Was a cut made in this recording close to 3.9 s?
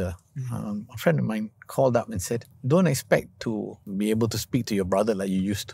yes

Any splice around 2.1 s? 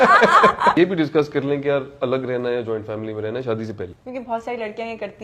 no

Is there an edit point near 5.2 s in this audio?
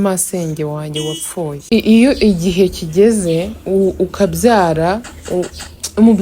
no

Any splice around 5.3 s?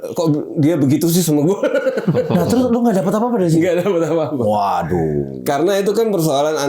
no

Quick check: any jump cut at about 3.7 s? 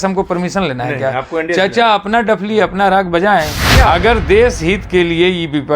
yes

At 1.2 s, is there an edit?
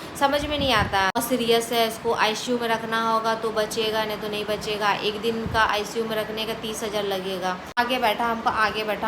yes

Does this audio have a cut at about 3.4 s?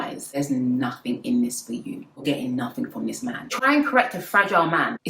yes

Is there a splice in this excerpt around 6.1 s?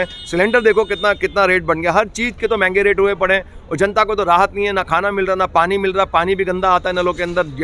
no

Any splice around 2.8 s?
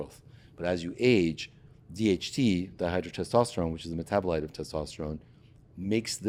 no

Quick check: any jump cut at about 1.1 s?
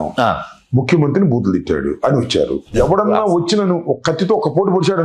no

